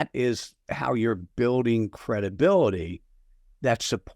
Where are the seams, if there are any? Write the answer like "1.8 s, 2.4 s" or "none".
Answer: none